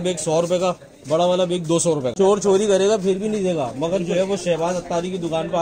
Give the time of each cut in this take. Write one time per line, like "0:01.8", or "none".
0:02.1